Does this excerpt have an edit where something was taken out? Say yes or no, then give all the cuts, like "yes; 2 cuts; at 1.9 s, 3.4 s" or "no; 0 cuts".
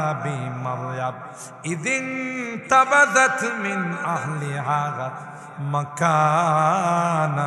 no; 0 cuts